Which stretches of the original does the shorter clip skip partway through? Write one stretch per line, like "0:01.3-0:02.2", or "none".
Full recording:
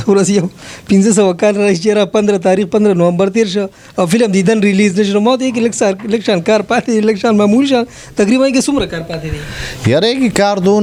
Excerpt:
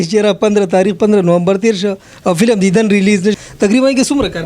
0:05.1-0:07.9